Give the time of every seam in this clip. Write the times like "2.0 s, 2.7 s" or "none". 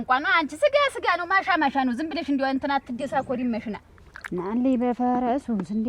3.8 s